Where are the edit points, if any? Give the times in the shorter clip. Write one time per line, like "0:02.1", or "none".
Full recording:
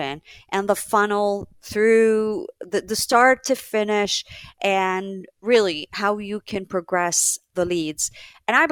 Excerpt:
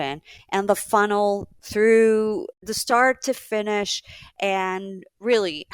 0:02.6